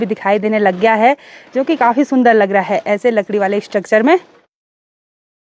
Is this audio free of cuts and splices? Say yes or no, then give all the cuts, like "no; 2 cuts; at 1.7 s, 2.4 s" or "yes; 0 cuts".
yes; 0 cuts